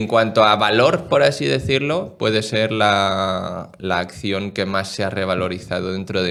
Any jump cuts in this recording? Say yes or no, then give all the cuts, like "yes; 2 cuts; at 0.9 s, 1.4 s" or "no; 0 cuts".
no; 0 cuts